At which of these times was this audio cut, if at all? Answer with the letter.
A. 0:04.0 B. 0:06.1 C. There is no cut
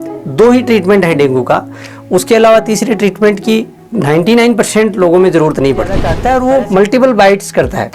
B